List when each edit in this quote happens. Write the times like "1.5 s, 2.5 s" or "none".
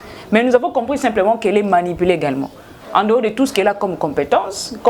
none